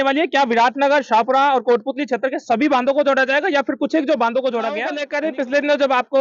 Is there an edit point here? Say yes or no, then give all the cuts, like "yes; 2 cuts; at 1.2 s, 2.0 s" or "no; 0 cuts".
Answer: yes; 1 cut; at 5.0 s